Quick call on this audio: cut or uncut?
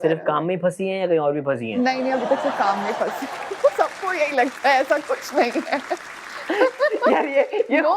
uncut